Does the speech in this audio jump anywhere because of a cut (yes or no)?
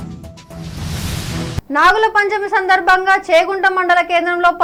no